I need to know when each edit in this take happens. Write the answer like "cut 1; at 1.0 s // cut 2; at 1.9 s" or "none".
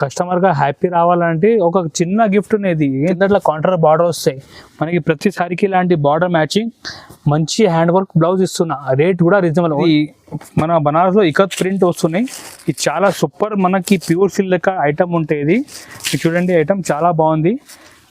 cut 1; at 3.0 s // cut 2; at 9.8 s